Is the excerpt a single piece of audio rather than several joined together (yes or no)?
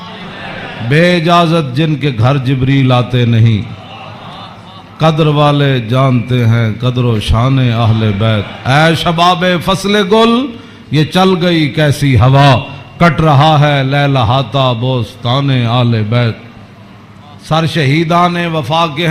yes